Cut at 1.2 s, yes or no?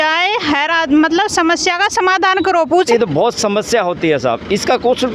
no